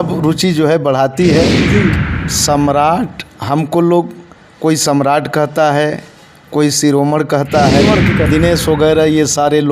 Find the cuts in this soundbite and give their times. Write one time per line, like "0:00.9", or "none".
0:01.9
0:08.3